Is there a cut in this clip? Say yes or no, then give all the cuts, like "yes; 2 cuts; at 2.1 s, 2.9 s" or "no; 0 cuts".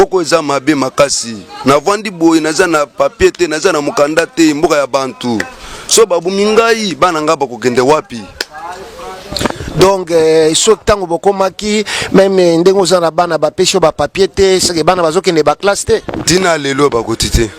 no; 0 cuts